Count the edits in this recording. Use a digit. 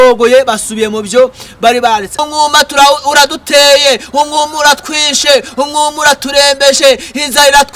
1